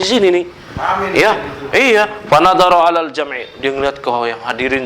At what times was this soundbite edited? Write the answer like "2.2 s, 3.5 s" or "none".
none